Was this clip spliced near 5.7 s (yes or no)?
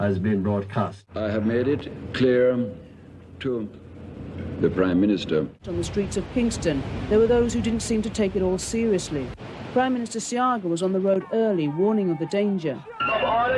yes